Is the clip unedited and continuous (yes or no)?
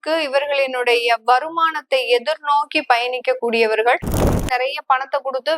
no